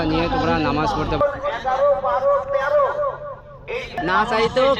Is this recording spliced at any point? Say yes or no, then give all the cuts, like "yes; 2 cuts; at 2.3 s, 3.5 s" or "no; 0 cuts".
yes; 2 cuts; at 1.2 s, 4.0 s